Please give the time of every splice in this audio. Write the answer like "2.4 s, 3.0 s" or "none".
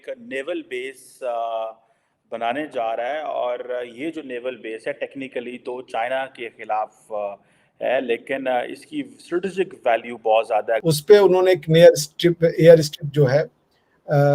10.8 s